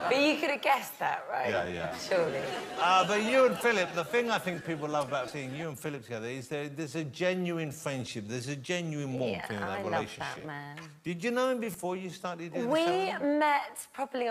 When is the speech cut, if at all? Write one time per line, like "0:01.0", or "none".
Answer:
0:06.0